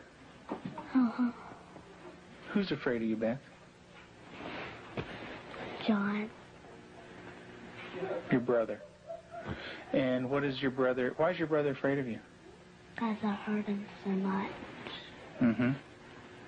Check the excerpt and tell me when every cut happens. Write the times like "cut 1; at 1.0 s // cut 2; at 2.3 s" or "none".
none